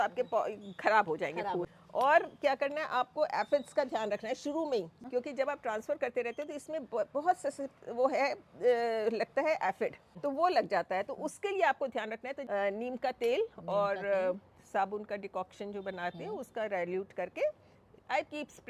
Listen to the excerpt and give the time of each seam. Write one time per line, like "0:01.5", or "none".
0:01.7
0:05.0
0:12.4